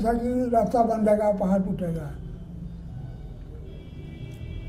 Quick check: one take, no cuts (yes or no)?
yes